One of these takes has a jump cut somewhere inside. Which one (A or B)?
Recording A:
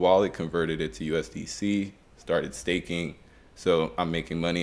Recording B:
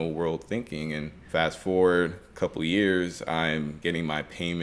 B